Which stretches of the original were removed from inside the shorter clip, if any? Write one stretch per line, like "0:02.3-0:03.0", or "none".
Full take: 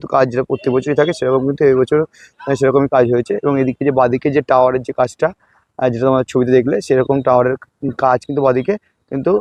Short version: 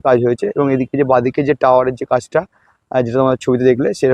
none